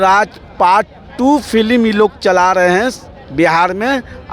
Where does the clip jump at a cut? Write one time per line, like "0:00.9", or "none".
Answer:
none